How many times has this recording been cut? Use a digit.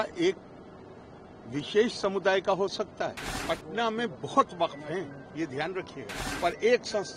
2